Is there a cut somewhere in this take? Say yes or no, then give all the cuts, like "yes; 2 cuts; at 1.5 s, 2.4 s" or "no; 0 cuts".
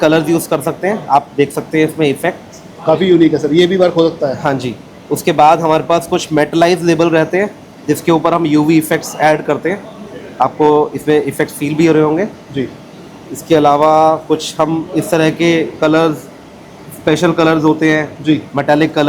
no; 0 cuts